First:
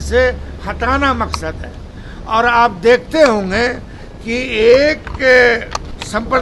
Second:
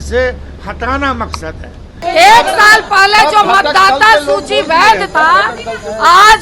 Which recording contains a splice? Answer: second; 1 cut; at 2.0 s

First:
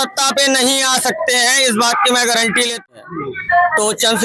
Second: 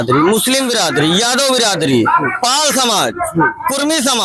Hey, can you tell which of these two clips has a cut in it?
first; 1 cut; at 3.1 s

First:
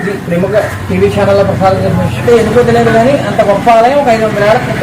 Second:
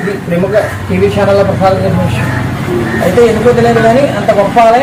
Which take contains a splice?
first; 1 cut; at 2.2 s

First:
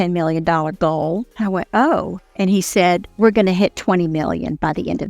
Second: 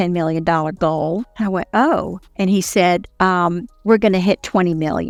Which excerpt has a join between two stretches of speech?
first; 1 cut; at 3.1 s

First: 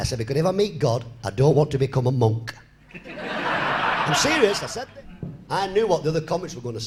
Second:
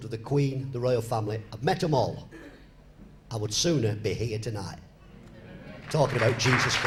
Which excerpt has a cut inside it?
first; 1 cut; at 4.6 s

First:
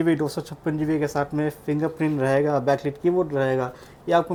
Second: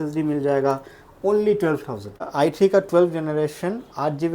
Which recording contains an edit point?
second; 1 cut; at 2.3 s

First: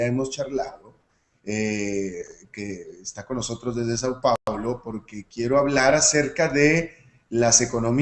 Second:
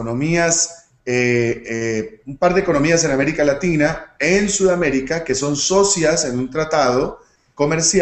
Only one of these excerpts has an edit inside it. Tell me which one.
second; 1 cut; at 3.3 s

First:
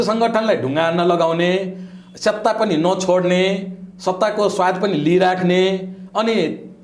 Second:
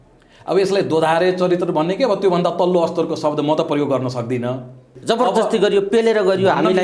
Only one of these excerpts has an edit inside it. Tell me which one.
second; 1 cut; at 4.9 s

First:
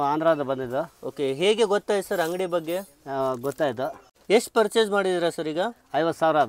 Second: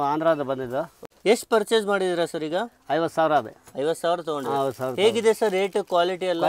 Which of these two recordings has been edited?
second; 1 cut; at 1.0 s

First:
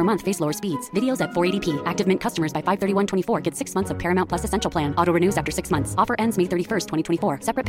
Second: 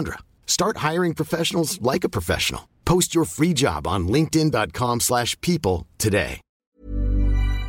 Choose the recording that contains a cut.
second; 1 cut; at 6.5 s

